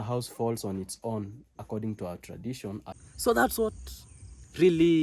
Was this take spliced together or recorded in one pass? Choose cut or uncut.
cut